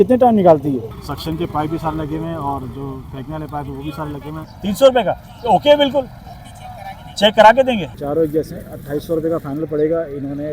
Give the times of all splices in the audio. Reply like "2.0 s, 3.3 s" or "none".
0.9 s, 4.5 s, 7.9 s